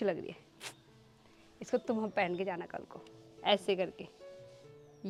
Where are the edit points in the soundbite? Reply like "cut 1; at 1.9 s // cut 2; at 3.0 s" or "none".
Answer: none